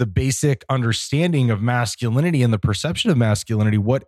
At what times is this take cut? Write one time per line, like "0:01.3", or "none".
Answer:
none